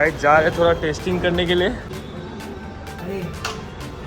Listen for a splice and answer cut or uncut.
cut